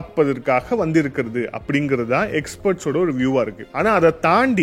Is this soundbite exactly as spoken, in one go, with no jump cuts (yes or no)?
no